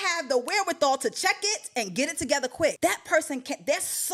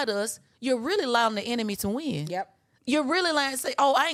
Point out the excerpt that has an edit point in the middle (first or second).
first